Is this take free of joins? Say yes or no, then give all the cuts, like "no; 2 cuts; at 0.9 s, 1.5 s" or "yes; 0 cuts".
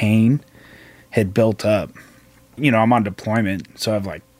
no; 1 cut; at 2.6 s